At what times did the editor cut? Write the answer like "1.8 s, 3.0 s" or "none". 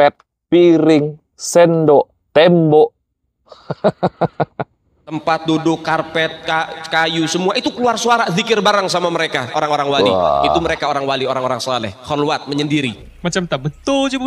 13.1 s